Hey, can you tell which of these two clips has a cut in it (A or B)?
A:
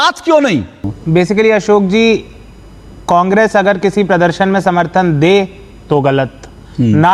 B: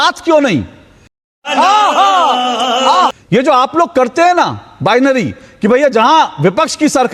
A